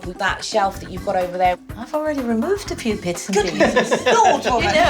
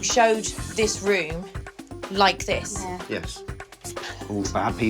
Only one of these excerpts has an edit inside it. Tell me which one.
first; 1 cut; at 1.7 s

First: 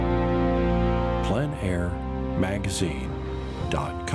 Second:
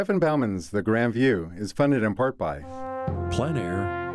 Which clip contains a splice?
second; 1 cut; at 2.7 s

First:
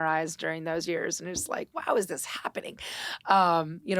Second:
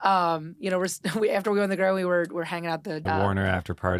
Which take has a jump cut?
second; 1 cut; at 3.0 s

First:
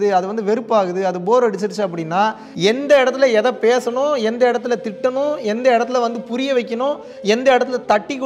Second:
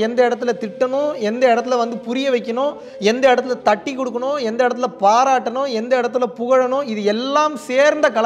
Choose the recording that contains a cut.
first; 1 cut; at 2.5 s

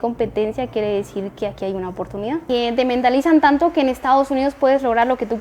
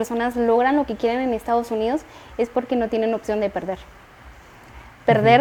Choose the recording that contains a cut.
first; 1 cut; at 2.4 s

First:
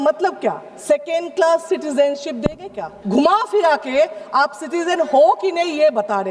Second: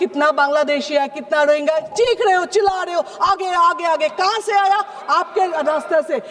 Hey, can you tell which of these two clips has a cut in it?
first; 1 cut; at 2.9 s

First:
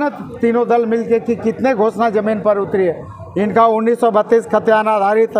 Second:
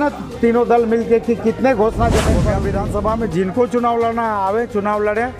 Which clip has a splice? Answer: second; 1 cut; at 2.4 s

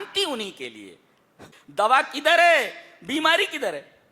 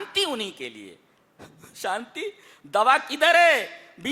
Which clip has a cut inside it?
first; 1 cut; at 1.6 s

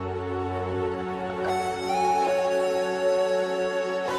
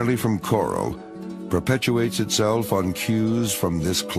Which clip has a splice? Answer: first; 1 cut; at 3.1 s

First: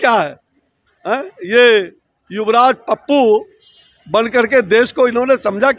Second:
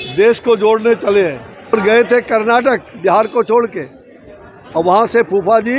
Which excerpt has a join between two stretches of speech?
second; 1 cut; at 1.7 s

